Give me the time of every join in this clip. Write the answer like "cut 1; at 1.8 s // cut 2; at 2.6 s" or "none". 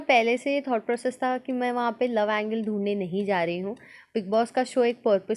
none